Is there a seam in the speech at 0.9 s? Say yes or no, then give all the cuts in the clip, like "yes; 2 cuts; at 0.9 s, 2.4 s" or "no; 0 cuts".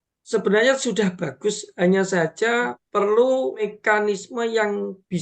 no; 2 cuts; at 2.8 s, 3.7 s